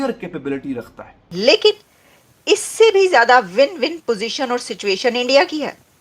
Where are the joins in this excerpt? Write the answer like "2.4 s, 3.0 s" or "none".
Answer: 1.2 s